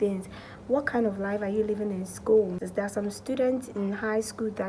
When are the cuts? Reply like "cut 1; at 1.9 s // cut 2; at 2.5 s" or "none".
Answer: cut 1; at 2.6 s